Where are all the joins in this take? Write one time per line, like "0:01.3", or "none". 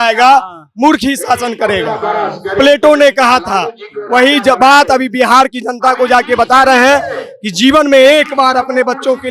none